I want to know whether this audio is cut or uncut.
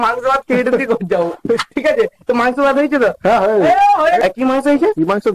cut